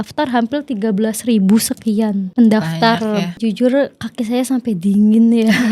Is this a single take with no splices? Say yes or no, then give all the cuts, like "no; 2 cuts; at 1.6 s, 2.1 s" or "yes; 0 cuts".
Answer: no; 2 cuts; at 2.2 s, 3.3 s